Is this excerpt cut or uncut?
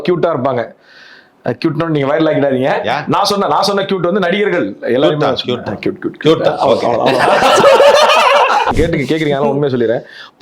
cut